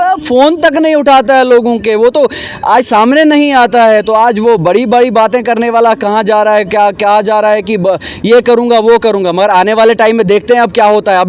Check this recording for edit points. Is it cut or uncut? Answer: uncut